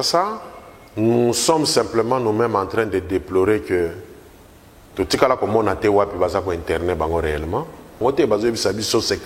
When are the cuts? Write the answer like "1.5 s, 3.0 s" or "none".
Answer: 8.0 s